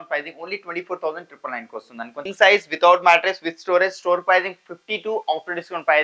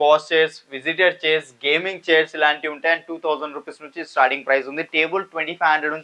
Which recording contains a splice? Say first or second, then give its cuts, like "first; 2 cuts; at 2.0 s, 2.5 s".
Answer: first; 1 cut; at 2.2 s